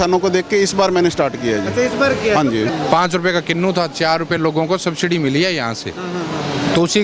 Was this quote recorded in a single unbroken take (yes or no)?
no